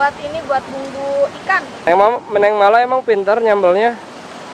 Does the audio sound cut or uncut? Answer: cut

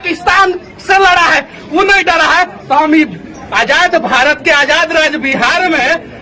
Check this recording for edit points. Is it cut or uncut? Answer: uncut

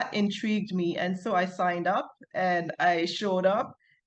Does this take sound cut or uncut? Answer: uncut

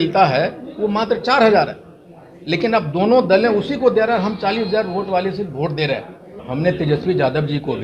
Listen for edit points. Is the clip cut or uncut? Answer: cut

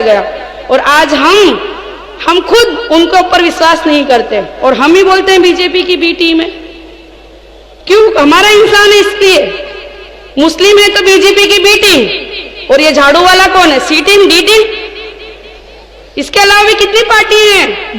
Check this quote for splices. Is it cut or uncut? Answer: uncut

